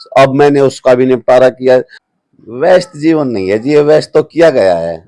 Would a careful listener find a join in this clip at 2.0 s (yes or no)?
yes